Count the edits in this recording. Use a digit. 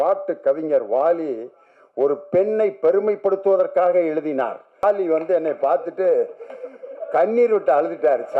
1